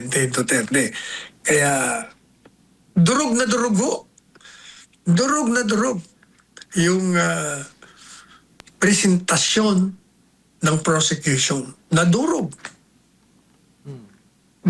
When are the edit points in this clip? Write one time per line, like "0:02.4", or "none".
none